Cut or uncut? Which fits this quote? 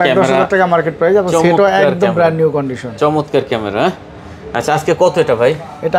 uncut